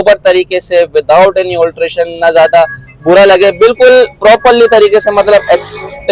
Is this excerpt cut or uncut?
uncut